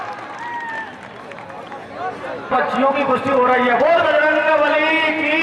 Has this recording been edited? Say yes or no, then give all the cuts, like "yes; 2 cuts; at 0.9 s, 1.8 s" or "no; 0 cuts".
yes; 1 cut; at 2.5 s